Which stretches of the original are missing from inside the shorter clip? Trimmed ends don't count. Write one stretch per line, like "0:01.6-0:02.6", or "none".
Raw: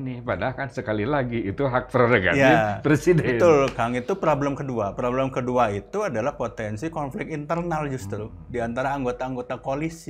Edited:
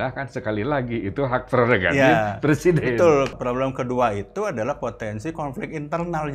0:03.8-0:04.9